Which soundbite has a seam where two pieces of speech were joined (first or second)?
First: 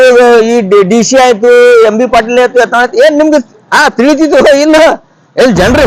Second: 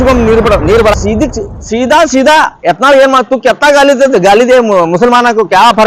second